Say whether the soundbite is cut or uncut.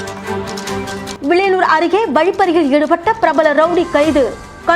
cut